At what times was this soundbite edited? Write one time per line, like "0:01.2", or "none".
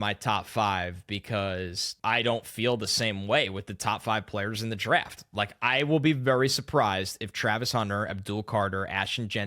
0:01.8